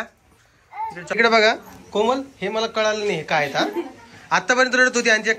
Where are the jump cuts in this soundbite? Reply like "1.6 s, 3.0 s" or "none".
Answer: 1.1 s